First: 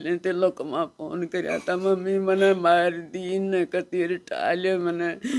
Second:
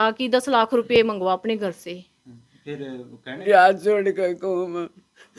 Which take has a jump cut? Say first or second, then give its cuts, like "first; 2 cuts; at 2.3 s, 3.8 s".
second; 1 cut; at 3.4 s